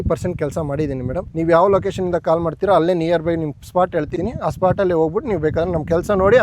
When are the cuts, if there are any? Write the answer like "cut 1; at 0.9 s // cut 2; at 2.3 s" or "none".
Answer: cut 1; at 1.3 s // cut 2; at 4.1 s